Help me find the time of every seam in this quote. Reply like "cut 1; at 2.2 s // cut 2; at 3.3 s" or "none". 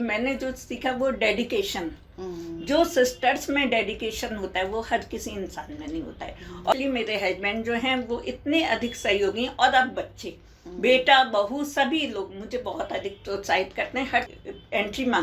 cut 1; at 6.7 s // cut 2; at 14.3 s